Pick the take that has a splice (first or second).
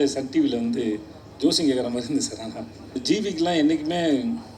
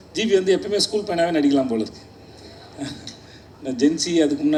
first